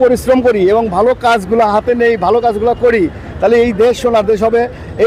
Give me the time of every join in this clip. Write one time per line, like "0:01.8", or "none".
none

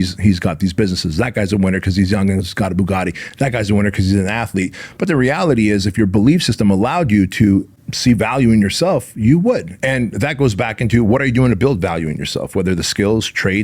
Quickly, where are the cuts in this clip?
none

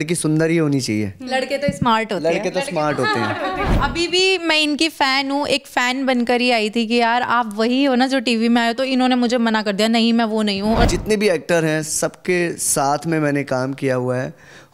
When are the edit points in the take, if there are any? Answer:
0:03.7
0:10.9

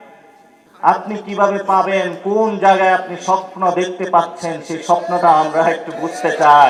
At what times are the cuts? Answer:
none

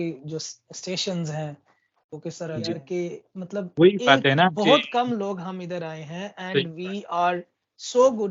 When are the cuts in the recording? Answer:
0:02.8

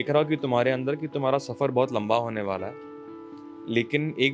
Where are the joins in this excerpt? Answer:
none

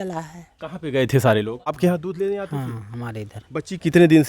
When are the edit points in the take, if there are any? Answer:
0:01.8

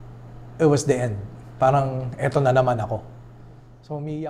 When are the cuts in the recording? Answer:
none

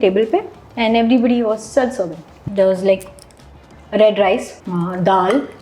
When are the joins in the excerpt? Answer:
0:02.4
0:04.6

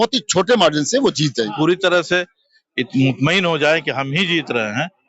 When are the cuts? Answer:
0:01.4

